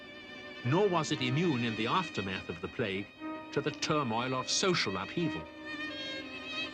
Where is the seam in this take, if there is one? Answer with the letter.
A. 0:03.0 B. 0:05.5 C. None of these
B